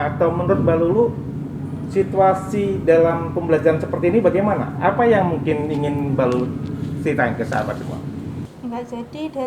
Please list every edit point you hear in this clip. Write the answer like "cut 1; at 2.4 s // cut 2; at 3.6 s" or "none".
cut 1; at 8.5 s